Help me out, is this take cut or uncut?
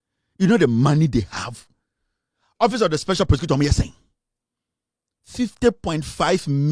uncut